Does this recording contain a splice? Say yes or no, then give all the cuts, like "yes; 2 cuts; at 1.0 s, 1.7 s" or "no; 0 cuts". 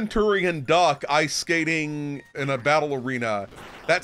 yes; 1 cut; at 2.3 s